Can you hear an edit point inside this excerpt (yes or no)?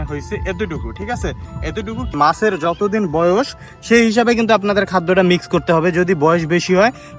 yes